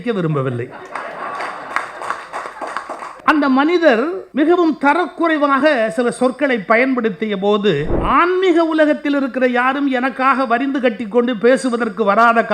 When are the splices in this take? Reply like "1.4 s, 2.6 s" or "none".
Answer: 3.2 s, 4.2 s, 7.9 s